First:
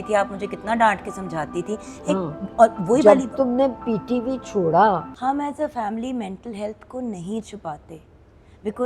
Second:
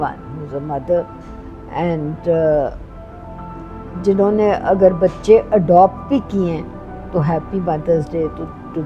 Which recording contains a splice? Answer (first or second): first